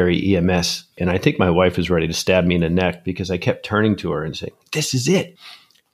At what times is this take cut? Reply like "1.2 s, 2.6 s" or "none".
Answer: 0.9 s